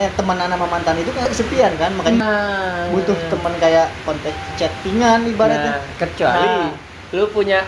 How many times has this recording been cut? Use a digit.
2